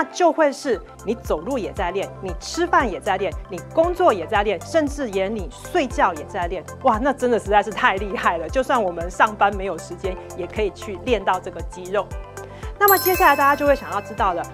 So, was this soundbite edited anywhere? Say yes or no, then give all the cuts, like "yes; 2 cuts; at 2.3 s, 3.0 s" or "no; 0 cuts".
no; 0 cuts